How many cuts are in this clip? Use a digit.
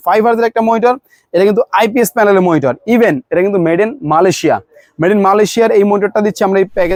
0